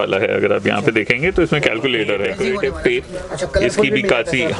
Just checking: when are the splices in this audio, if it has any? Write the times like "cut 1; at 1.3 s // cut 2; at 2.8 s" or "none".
cut 1; at 2.4 s